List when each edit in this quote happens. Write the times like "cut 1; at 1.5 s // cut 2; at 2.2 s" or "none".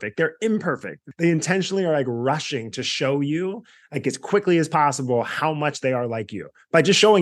cut 1; at 1.0 s